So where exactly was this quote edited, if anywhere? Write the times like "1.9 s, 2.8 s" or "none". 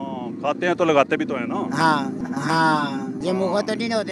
2.2 s